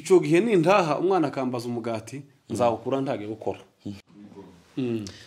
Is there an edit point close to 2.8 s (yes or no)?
no